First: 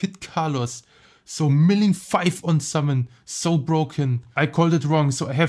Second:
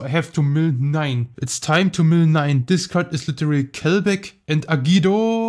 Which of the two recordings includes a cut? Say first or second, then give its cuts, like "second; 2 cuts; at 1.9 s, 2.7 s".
first; 1 cut; at 4.3 s